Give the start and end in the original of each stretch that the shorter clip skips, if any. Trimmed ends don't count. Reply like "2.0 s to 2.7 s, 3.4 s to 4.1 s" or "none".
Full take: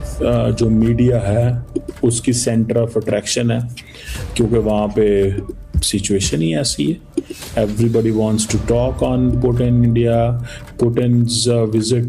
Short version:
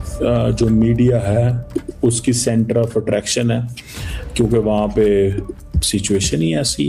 none